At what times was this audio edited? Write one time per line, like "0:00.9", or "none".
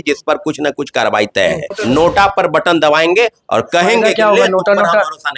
0:01.7